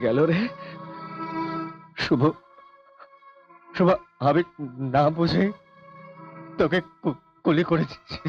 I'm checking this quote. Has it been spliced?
no; 0 cuts

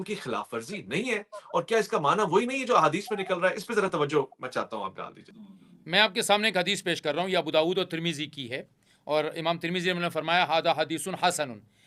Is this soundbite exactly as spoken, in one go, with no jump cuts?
yes; 0 cuts

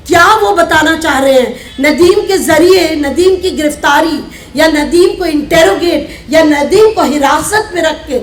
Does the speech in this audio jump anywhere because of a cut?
no; 0 cuts

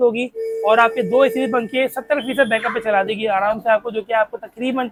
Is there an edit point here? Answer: no; 0 cuts

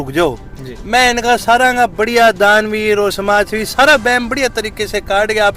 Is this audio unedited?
yes; 0 cuts

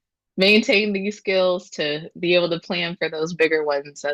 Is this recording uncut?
yes; 0 cuts

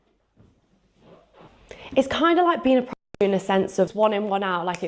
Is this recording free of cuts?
no; 2 cuts; at 1.5 s, 3.9 s

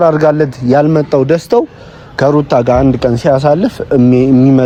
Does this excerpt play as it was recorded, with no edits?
yes; 0 cuts

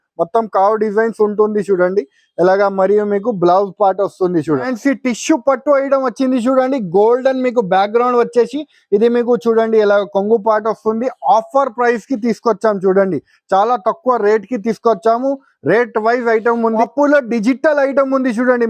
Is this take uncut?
no; 2 cuts; at 4.6 s, 16.8 s

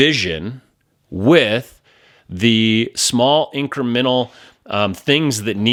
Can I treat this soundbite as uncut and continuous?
yes; 0 cuts

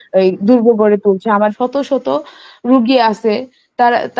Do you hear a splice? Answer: yes; 1 cut; at 1.5 s

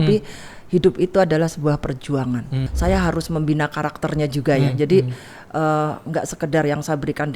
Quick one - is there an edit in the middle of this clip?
yes; 1 cut; at 2.6 s

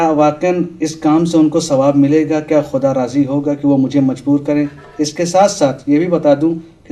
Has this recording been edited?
yes; 1 cut; at 1.7 s

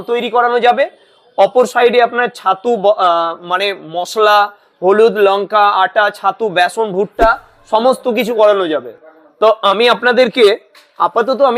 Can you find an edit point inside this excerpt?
no; 0 cuts

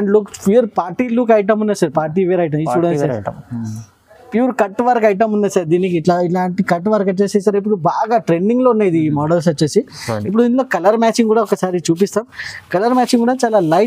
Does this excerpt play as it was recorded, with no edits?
yes; 0 cuts

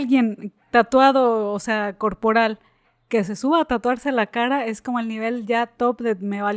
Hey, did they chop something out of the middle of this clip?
no; 0 cuts

